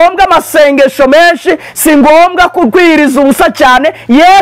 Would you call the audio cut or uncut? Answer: uncut